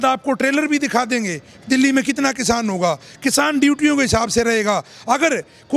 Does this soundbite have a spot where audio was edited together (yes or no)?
no